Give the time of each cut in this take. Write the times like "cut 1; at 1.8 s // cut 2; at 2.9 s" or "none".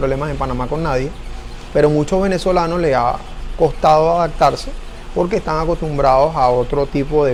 none